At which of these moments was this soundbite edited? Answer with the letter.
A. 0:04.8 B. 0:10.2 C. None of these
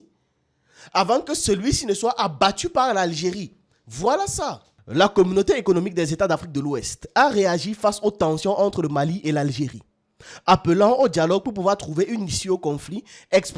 A